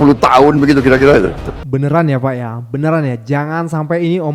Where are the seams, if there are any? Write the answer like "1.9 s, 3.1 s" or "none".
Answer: 1.5 s